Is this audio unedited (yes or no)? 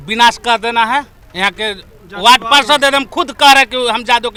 yes